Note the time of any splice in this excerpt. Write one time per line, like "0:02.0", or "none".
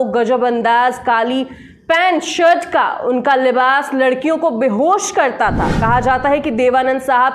0:05.8